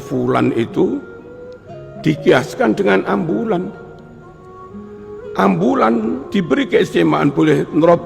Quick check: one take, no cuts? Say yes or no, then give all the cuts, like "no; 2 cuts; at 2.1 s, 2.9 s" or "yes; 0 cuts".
no; 1 cut; at 6.2 s